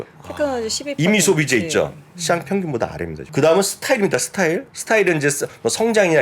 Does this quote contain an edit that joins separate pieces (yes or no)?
yes